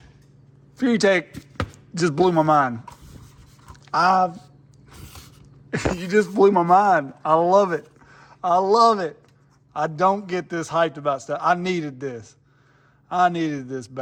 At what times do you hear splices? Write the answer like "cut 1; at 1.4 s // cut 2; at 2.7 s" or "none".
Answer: none